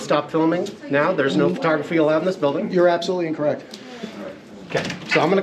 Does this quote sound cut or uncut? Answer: uncut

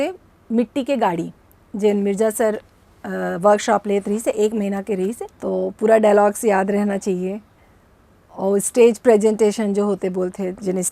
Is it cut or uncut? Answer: cut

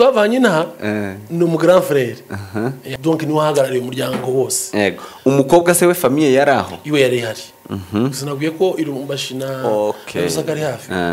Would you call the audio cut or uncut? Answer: cut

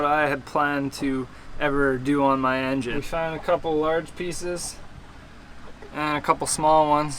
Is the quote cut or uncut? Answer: uncut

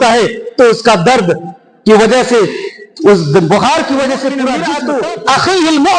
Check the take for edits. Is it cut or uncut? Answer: cut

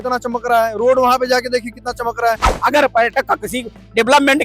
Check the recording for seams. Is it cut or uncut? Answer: cut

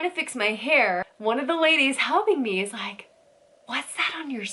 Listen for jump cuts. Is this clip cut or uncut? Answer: uncut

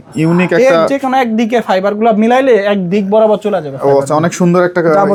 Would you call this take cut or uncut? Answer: uncut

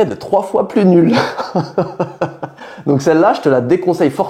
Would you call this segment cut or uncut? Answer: uncut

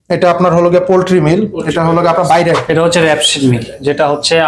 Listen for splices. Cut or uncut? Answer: cut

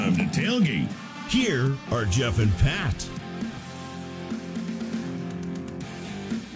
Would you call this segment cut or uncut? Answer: cut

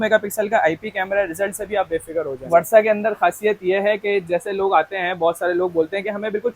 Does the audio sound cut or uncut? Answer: cut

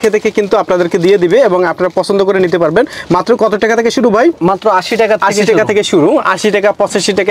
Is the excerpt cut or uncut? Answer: uncut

